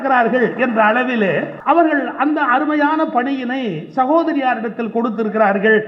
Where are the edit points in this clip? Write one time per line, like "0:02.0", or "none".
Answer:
0:01.5